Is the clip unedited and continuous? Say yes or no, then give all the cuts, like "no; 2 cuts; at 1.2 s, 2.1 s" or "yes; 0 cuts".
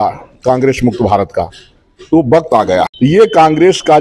no; 1 cut; at 2.9 s